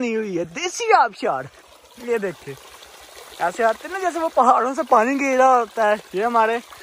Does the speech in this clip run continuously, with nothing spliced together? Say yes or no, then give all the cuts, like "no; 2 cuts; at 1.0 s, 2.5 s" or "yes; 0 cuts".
yes; 0 cuts